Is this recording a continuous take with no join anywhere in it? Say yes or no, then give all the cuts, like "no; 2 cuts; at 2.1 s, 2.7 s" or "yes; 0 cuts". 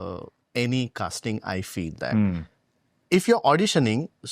yes; 0 cuts